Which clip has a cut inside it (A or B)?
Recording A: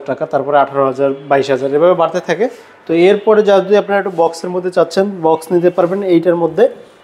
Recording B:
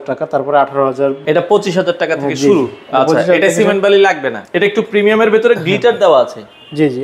B